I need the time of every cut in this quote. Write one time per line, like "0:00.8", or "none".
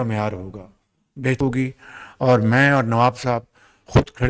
0:01.4

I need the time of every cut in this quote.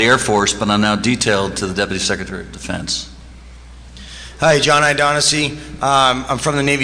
0:04.5

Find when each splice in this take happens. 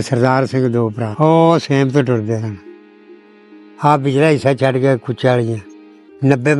0:01.0

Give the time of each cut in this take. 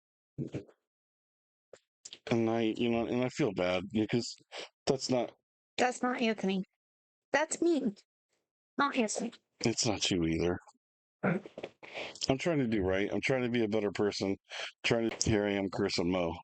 0:15.2

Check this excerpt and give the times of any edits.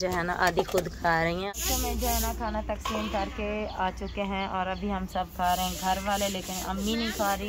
0:01.4

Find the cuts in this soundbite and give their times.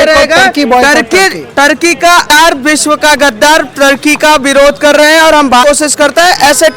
0:02.3
0:05.6

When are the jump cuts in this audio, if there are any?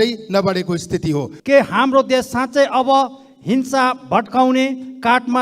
0:01.3

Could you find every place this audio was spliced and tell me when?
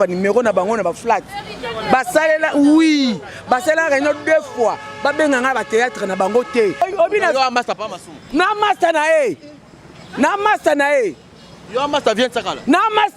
0:06.8

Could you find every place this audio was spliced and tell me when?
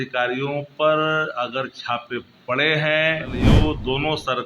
0:03.5

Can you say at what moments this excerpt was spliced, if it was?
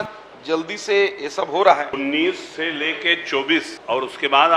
0:01.9

